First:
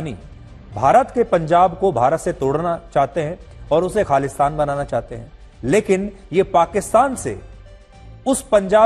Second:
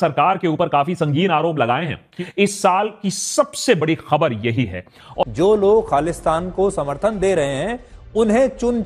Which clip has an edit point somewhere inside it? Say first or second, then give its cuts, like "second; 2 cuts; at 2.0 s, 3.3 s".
second; 2 cuts; at 2.0 s, 5.2 s